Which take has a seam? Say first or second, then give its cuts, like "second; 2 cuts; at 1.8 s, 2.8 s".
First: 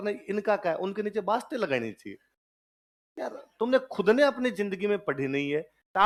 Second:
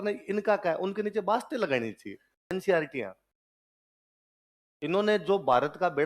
second; 1 cut; at 2.5 s